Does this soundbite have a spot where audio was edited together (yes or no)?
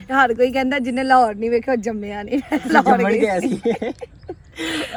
no